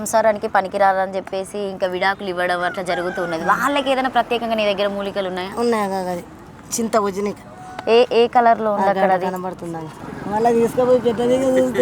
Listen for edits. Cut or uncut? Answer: cut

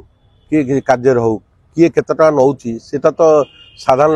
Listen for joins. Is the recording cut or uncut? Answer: uncut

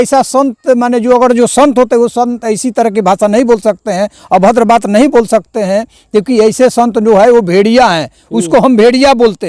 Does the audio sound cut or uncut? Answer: uncut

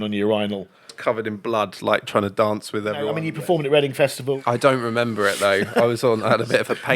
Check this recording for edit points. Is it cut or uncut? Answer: cut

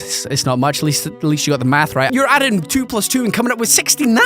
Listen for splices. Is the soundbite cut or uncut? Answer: cut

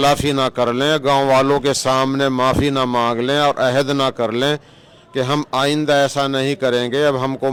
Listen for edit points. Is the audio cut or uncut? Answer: uncut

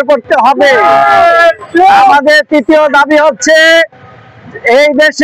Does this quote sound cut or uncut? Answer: uncut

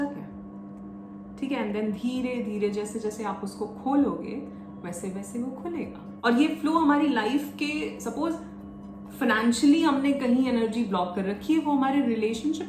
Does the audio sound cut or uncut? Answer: cut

